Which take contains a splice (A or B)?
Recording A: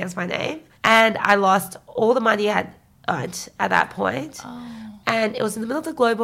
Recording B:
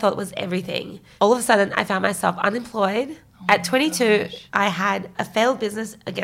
B